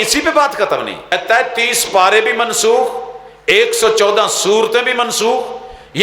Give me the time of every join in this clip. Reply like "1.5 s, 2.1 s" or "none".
1.1 s